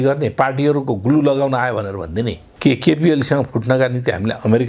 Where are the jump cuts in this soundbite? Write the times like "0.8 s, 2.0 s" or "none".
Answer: 2.4 s

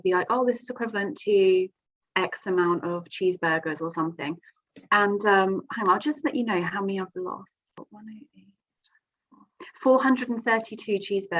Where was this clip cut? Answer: 7.8 s

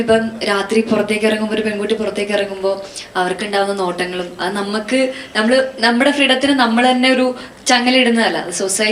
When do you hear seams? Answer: none

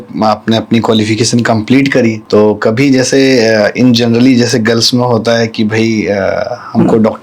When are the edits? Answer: 2.2 s

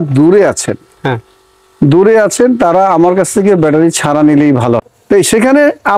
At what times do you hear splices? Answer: 4.8 s

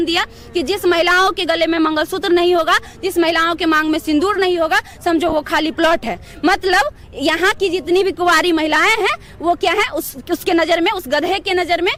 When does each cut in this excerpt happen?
none

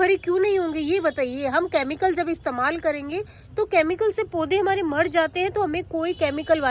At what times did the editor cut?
none

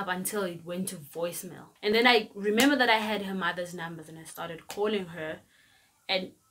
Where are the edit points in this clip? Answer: 1.9 s

